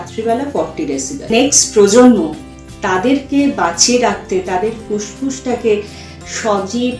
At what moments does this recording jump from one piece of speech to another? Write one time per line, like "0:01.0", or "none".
0:01.3